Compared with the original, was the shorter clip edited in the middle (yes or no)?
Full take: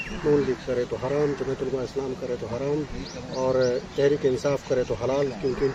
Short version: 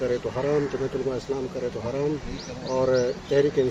no